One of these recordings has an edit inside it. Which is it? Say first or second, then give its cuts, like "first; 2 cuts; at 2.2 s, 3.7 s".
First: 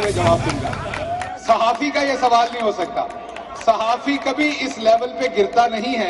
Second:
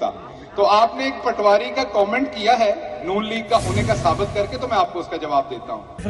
second; 1 cut; at 1.8 s